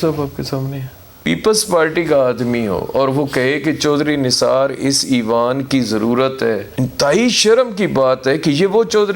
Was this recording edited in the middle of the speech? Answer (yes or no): yes